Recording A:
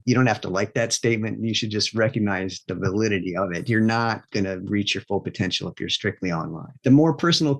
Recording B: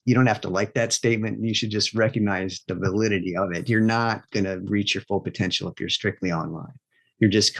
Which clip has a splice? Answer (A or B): A